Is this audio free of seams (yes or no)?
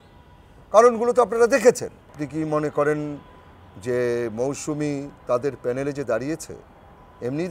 no